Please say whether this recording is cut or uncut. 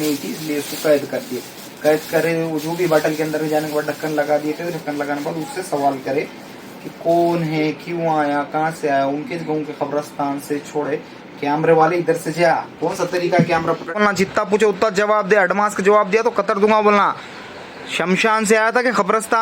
cut